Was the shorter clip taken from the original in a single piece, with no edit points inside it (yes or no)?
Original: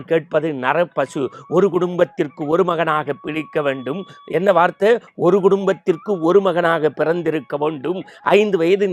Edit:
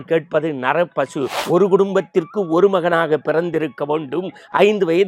no